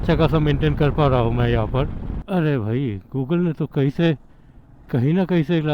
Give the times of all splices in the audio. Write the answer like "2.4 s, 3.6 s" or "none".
2.1 s